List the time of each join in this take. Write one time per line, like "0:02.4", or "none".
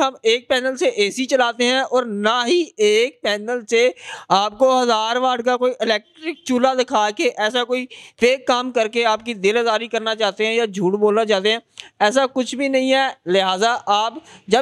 none